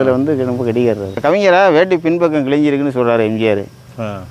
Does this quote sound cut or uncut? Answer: cut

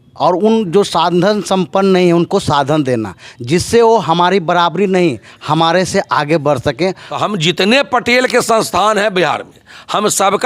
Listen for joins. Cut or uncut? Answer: cut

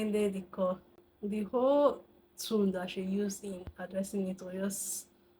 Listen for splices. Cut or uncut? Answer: cut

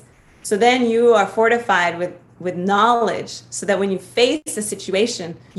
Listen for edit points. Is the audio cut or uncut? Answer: cut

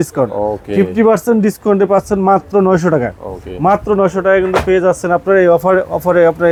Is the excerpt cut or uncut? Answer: uncut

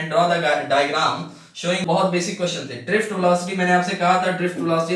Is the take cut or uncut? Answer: cut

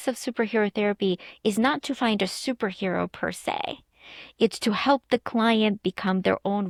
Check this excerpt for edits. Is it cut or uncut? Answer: uncut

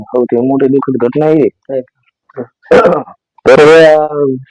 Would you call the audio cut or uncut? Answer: cut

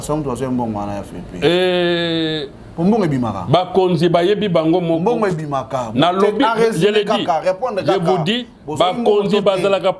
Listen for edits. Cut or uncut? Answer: uncut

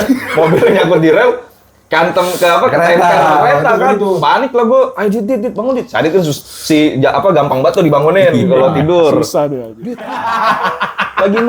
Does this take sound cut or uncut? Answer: cut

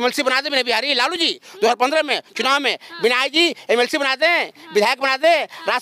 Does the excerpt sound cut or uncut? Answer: uncut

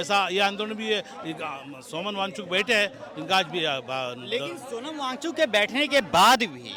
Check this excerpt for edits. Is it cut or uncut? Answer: uncut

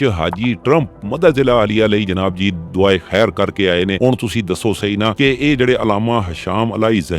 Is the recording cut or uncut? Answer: uncut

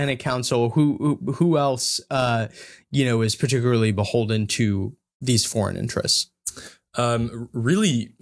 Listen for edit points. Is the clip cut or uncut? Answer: uncut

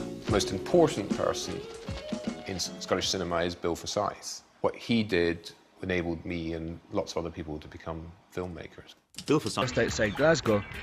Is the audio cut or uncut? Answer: uncut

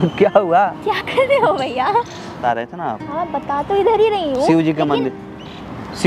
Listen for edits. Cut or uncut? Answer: cut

